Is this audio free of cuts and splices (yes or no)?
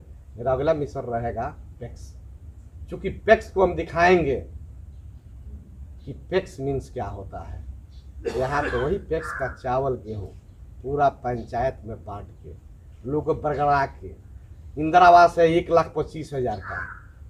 yes